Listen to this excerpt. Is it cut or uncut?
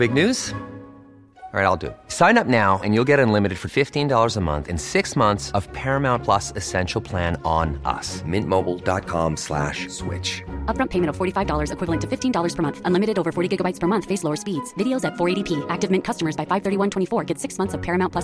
uncut